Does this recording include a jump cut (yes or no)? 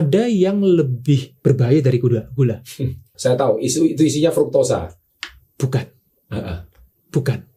yes